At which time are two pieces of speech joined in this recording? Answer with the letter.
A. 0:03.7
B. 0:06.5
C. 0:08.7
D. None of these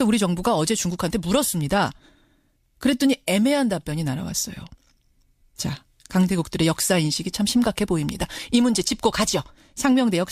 A